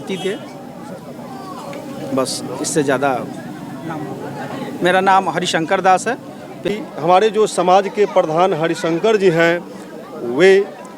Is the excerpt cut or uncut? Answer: cut